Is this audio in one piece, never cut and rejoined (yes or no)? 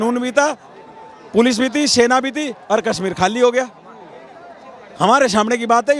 yes